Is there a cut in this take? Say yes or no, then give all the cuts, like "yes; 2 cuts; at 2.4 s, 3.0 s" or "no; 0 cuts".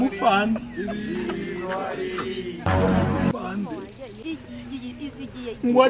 yes; 1 cut; at 4.2 s